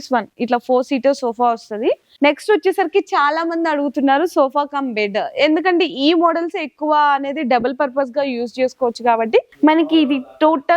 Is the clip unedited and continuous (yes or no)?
no